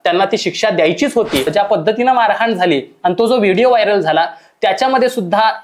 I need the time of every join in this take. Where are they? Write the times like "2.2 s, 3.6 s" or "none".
1.5 s